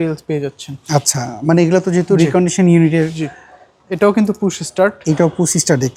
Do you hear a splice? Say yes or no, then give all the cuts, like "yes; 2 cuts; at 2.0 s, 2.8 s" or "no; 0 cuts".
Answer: no; 0 cuts